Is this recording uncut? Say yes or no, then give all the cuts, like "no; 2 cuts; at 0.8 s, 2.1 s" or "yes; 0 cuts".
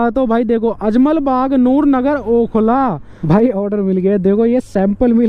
no; 1 cut; at 3.3 s